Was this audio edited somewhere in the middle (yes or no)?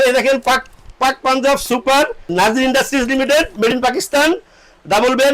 yes